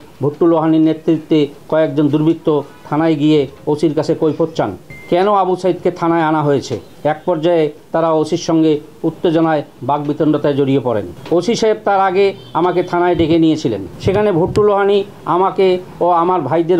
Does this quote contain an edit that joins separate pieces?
no; 0 cuts

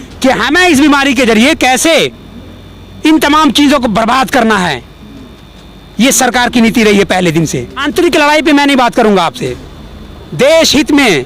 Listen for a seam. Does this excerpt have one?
yes; 1 cut; at 7.8 s

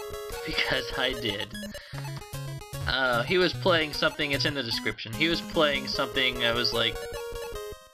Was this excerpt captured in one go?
no; 1 cut; at 7.0 s

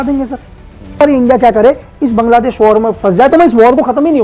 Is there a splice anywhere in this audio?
yes; 1 cut; at 1.0 s

